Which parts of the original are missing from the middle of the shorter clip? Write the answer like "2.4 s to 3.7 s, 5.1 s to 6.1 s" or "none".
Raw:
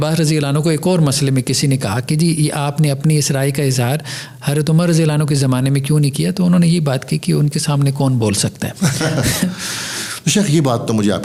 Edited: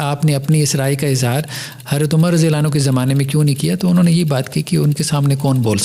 none